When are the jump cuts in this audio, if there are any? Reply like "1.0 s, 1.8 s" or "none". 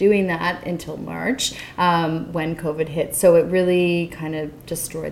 none